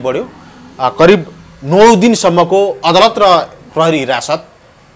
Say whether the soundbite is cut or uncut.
uncut